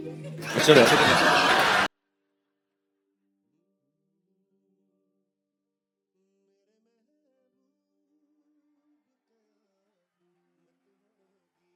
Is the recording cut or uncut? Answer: uncut